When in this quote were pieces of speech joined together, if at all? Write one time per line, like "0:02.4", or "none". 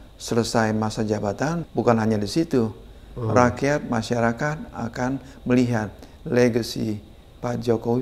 0:01.6